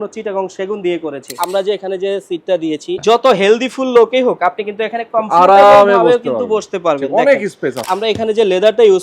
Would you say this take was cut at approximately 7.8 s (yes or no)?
yes